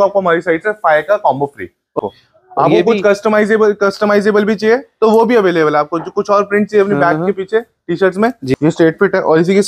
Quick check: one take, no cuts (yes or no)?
no